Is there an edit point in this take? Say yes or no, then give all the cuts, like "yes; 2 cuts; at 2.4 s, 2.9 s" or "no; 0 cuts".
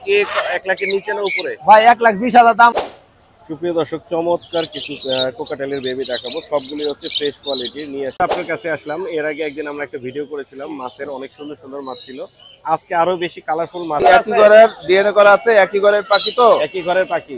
yes; 3 cuts; at 2.7 s, 8.2 s, 14.0 s